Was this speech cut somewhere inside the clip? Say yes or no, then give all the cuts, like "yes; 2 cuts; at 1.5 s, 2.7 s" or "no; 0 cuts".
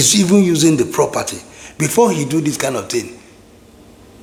no; 0 cuts